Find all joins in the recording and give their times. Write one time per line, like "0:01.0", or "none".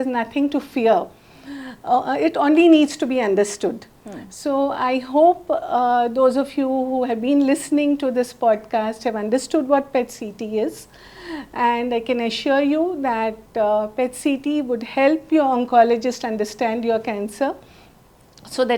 none